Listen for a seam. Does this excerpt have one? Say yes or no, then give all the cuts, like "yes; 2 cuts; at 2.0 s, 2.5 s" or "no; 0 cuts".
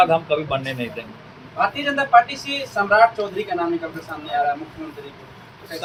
no; 0 cuts